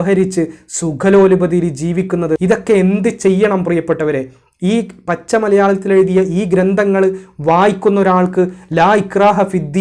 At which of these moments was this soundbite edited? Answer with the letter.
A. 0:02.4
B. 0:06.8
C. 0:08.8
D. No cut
A